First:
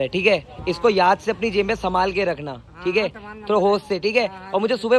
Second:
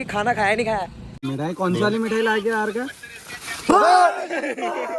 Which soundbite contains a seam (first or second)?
second